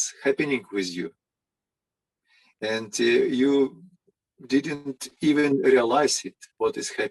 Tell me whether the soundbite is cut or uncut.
uncut